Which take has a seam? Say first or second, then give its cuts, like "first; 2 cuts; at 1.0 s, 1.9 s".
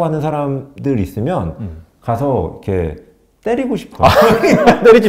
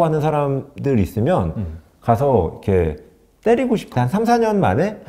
second; 1 cut; at 3.9 s